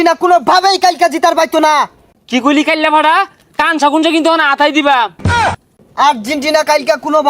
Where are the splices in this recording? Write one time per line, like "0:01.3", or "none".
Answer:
0:02.0
0:05.6

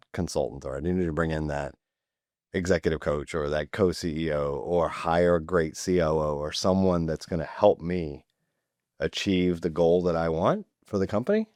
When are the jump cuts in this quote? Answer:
none

